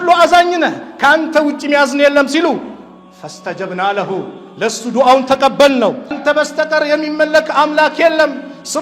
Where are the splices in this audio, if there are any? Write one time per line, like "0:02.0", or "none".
0:06.2